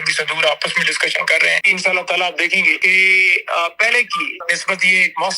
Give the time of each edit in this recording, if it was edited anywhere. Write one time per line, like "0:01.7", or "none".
0:01.7
0:02.8
0:04.3